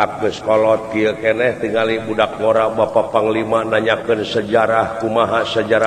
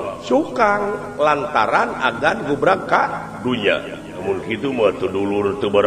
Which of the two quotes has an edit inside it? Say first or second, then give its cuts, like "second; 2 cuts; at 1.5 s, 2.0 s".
second; 1 cut; at 4.2 s